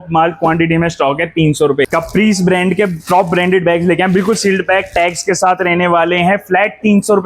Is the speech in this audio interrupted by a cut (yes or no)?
yes